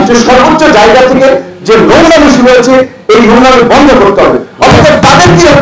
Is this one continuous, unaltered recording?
yes; 0 cuts

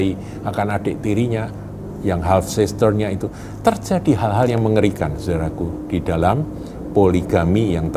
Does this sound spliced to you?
no; 0 cuts

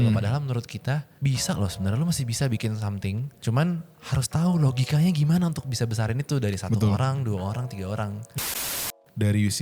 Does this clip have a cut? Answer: yes; 3 cuts; at 1.1 s, 3.4 s, 8.5 s

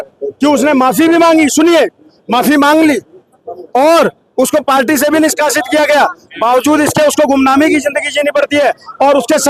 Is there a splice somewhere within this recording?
no; 0 cuts

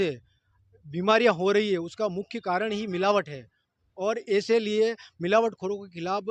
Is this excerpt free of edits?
yes; 0 cuts

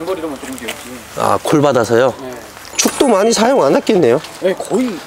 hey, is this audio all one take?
yes; 0 cuts

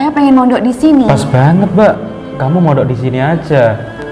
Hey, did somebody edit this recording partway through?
yes; 1 cut; at 1.2 s

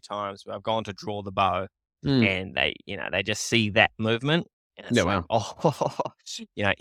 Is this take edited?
no; 0 cuts

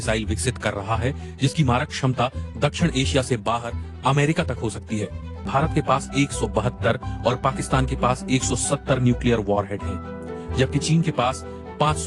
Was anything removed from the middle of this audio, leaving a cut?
yes; 1 cut; at 5.5 s

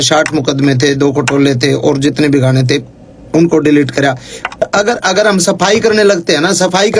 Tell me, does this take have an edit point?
yes; 1 cut; at 4.6 s

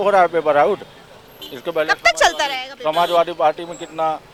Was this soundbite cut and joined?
no; 0 cuts

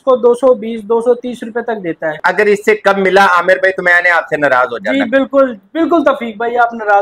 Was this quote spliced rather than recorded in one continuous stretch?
yes; 1 cut; at 2.2 s

